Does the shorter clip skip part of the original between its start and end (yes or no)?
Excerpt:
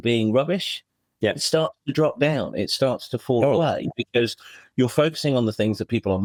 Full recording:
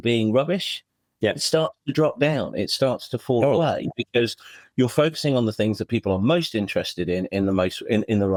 no